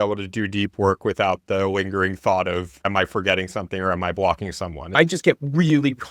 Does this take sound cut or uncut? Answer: cut